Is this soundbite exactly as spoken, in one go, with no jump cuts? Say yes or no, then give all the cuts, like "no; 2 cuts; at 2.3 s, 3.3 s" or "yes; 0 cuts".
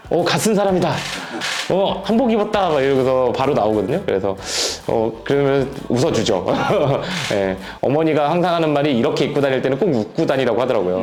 yes; 0 cuts